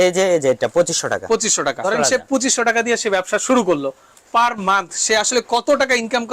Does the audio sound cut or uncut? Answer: cut